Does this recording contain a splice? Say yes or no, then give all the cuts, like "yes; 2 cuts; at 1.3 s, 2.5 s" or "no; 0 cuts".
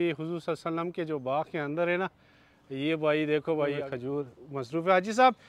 yes; 1 cut; at 3.9 s